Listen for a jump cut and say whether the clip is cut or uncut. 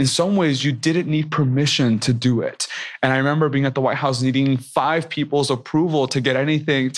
uncut